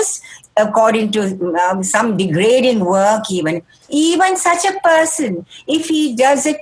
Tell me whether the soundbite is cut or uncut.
uncut